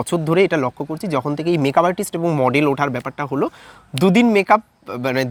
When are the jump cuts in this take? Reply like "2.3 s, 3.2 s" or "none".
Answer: none